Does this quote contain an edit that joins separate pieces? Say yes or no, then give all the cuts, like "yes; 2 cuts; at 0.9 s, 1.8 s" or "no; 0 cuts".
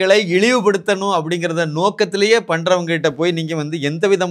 no; 0 cuts